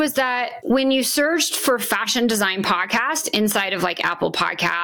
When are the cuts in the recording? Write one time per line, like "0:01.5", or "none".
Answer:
none